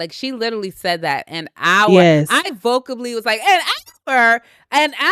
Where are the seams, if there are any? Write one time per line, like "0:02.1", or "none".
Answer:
0:02.6